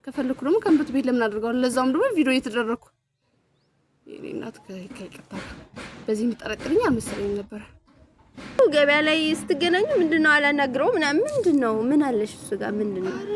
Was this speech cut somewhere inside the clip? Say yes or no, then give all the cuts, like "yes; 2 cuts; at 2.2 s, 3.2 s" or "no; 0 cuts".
yes; 1 cut; at 8.6 s